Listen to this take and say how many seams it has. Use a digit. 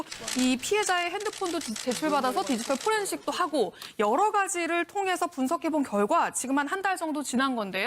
1